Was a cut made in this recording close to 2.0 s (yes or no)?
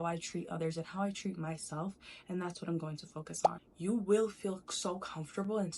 no